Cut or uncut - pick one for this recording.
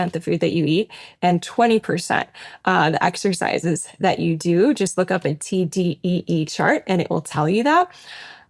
uncut